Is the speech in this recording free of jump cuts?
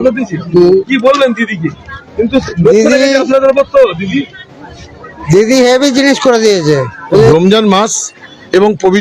no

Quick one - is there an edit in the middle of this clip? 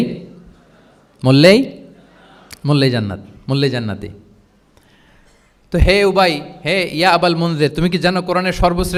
no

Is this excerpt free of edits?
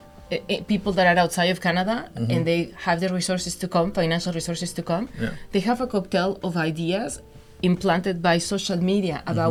yes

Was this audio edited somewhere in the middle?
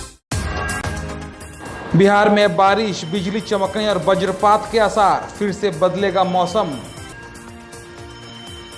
no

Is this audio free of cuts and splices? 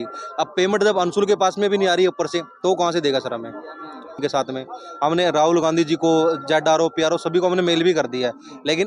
no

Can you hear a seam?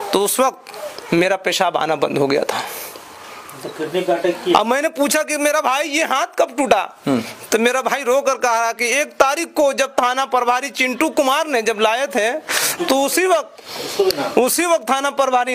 no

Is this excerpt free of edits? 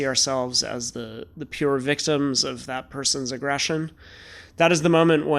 yes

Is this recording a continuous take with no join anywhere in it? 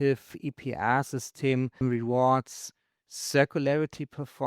no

